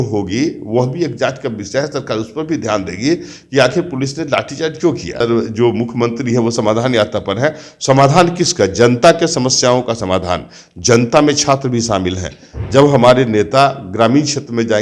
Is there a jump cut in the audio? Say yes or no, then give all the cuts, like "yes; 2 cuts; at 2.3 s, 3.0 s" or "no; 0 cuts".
yes; 1 cut; at 5.2 s